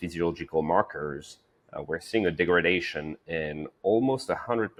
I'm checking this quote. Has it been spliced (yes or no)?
no